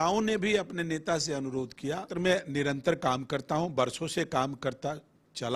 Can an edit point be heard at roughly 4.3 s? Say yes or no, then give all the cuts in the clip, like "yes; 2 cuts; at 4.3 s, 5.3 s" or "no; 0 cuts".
no; 1 cut; at 2.1 s